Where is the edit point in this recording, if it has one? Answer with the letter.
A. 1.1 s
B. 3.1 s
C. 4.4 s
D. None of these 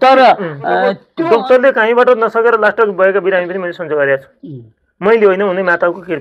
A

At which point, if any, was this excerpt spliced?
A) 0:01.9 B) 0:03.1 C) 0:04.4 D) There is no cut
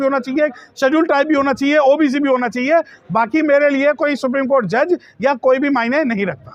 D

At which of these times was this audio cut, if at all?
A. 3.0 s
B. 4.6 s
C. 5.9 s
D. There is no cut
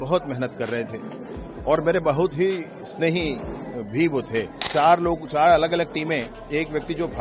B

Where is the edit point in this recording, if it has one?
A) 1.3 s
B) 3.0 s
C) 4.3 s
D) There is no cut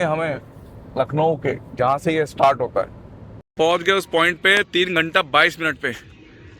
B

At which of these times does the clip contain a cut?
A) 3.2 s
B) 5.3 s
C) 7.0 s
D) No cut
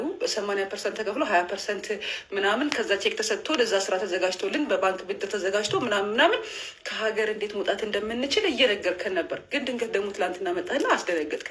D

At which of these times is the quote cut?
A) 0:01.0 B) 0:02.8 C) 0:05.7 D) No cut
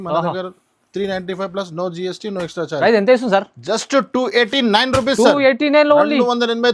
B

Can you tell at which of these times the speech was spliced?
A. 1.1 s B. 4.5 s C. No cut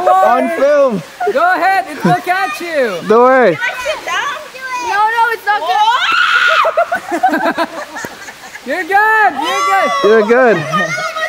B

